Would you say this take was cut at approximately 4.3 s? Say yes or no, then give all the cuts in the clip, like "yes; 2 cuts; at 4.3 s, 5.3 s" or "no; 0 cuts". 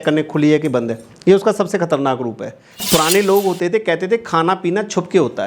no; 1 cut; at 2.8 s